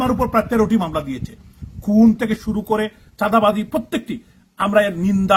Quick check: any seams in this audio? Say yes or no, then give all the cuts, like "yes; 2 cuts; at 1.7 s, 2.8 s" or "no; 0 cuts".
no; 0 cuts